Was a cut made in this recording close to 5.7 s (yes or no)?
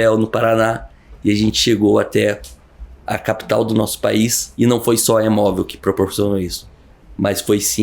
no